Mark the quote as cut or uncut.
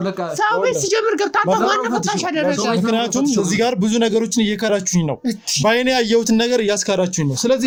uncut